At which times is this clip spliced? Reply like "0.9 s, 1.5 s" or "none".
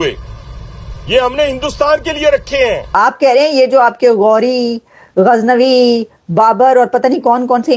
2.9 s